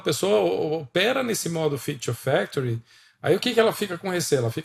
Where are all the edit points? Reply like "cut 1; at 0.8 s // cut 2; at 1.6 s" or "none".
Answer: none